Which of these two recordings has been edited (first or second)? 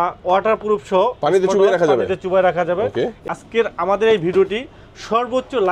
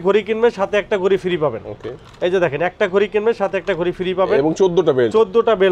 first